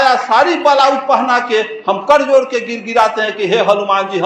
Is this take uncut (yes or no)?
yes